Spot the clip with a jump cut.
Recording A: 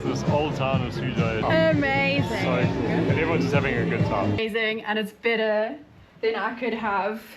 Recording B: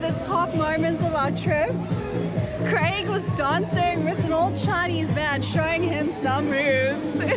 A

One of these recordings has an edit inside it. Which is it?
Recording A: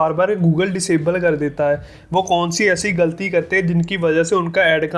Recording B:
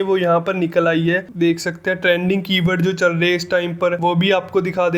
B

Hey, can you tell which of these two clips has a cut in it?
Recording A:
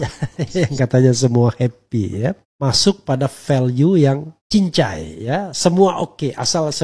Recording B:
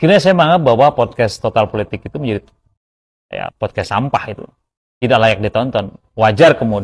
A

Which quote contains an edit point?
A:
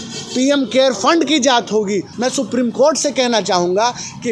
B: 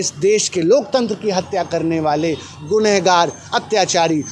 A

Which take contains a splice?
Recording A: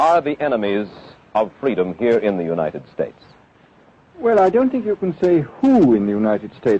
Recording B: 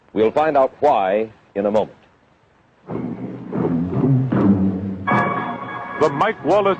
A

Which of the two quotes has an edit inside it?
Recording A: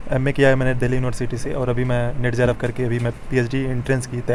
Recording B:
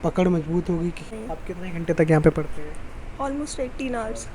B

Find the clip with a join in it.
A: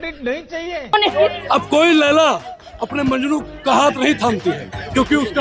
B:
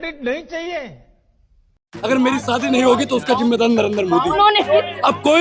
A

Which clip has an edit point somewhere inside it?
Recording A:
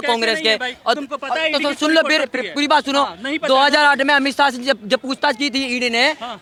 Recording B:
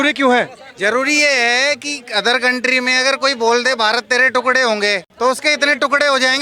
B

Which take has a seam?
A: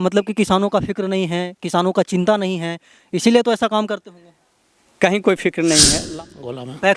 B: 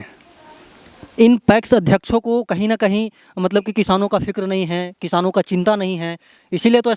A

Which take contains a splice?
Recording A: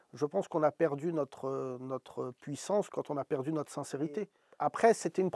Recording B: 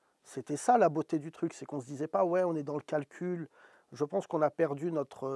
A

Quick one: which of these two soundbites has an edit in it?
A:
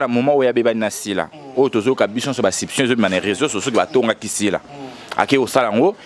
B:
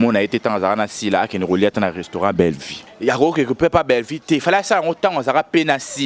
B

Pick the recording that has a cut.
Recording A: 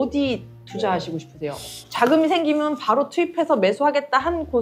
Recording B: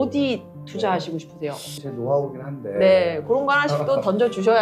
B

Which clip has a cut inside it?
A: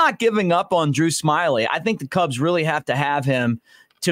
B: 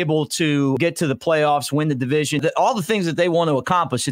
B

